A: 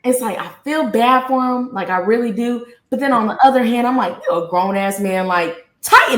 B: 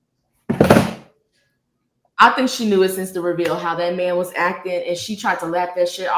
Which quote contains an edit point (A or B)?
B